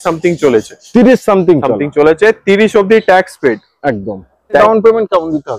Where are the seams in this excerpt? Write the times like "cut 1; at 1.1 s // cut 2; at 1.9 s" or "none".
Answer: cut 1; at 4.6 s